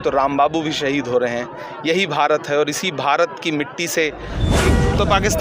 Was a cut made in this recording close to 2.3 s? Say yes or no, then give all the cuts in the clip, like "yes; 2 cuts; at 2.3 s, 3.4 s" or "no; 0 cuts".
no; 1 cut; at 4.5 s